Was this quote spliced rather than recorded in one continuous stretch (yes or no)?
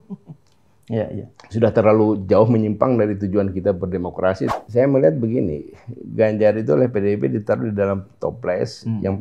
yes